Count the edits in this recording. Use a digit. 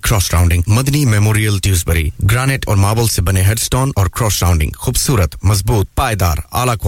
0